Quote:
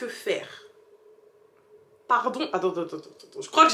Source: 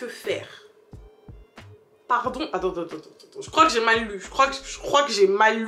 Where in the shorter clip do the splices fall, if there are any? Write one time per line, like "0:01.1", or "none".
none